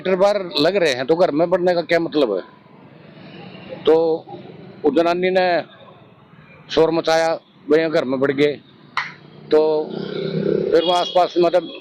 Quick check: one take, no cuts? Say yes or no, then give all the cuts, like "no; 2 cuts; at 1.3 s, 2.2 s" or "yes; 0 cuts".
yes; 0 cuts